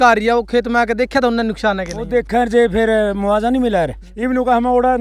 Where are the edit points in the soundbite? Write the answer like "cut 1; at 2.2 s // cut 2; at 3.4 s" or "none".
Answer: cut 1; at 4.1 s